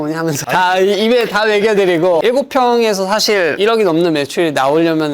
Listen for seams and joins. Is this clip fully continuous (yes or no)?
no